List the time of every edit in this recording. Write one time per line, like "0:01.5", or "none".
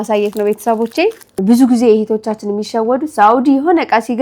0:01.3